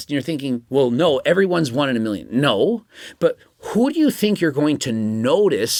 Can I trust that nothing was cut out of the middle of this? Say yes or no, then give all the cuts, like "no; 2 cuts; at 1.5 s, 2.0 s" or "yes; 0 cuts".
yes; 0 cuts